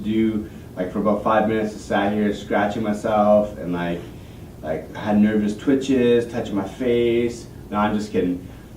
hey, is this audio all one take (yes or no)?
no